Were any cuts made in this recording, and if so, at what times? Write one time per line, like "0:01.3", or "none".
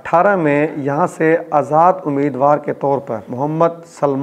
0:03.2